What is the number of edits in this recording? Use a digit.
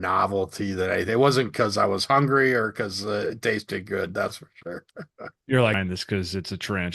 1